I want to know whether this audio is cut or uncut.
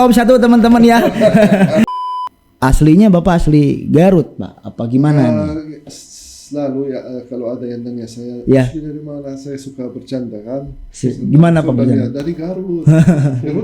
cut